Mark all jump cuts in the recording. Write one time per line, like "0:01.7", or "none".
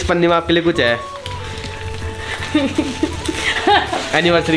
none